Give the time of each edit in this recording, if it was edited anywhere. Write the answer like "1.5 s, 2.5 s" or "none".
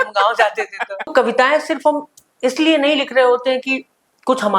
1.1 s